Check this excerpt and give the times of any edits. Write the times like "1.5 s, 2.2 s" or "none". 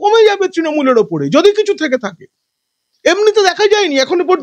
none